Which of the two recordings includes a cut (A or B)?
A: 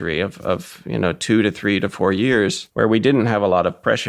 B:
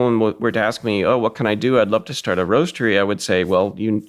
A